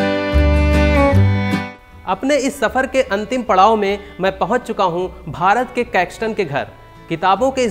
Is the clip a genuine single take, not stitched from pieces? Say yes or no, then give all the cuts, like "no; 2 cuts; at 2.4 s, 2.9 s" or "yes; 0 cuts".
no; 1 cut; at 1.8 s